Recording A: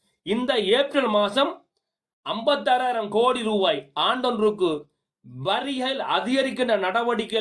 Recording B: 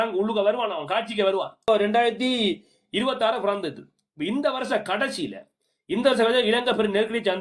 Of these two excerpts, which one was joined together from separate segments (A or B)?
B